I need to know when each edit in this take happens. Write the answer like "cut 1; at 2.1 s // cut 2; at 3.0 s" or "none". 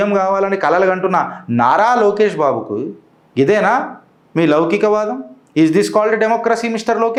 none